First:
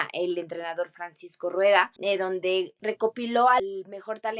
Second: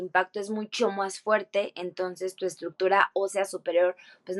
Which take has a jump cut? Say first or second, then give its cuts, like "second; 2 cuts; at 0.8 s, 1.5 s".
first; 3 cuts; at 1.9 s, 2.7 s, 3.6 s